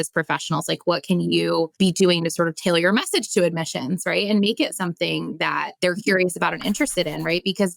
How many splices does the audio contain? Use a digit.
2